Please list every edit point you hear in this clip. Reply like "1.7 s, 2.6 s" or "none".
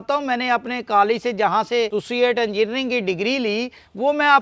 2.0 s